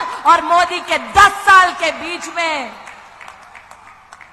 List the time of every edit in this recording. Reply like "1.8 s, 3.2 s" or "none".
none